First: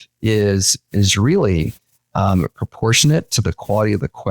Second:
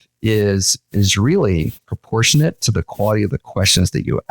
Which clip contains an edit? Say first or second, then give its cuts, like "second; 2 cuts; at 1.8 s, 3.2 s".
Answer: second; 1 cut; at 1.9 s